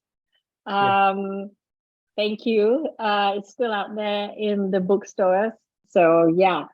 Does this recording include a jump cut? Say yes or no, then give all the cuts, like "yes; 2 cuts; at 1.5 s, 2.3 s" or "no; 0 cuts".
yes; 1 cut; at 5.8 s